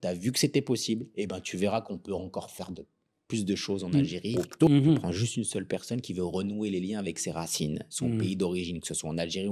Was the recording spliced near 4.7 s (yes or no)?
yes